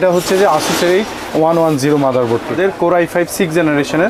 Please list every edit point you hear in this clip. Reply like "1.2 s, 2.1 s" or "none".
2.5 s